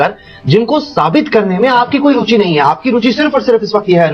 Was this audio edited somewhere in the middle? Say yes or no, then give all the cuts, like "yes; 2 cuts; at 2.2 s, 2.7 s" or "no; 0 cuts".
no; 0 cuts